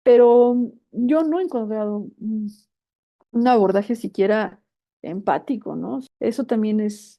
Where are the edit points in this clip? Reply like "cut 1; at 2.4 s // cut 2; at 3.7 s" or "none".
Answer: cut 1; at 6.1 s